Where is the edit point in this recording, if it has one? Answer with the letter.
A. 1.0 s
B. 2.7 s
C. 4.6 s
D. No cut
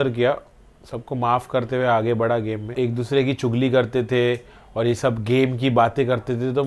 B